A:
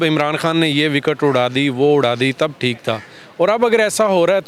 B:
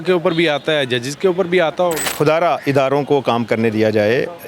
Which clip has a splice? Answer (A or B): B